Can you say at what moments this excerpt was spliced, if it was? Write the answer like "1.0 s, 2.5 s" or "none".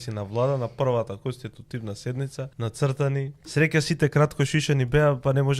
2.5 s, 3.4 s